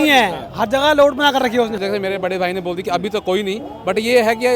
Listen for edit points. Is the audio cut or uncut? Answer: cut